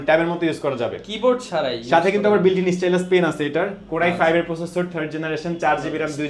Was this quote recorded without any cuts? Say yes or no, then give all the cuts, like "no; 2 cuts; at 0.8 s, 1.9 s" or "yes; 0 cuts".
yes; 0 cuts